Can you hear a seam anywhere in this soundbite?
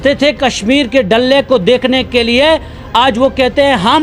no; 0 cuts

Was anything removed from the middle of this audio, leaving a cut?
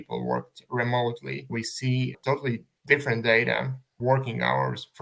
yes; 1 cut; at 2.7 s

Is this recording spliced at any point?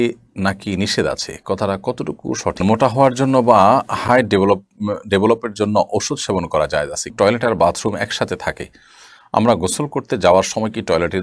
yes; 2 cuts; at 2.6 s, 7.1 s

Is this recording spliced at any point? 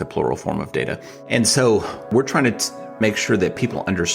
yes; 2 cuts; at 1.1 s, 2.1 s

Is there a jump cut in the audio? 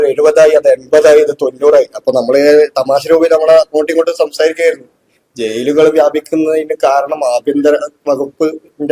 no; 0 cuts

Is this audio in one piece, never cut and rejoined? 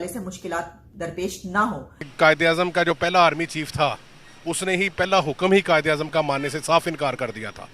no; 1 cut; at 2.1 s

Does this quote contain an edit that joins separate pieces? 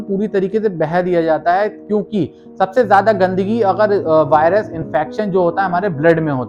no; 0 cuts

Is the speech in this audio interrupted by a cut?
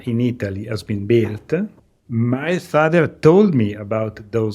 yes; 1 cut; at 2.0 s

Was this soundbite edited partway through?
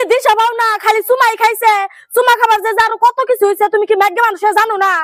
no; 0 cuts

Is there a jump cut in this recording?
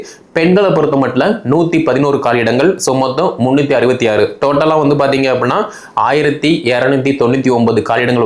no; 0 cuts

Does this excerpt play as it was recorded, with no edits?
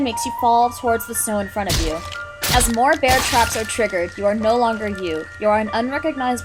yes; 0 cuts

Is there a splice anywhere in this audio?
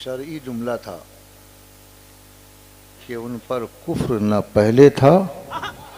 no; 0 cuts

